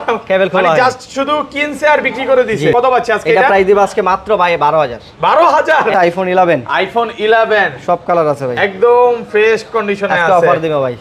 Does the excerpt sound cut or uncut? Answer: cut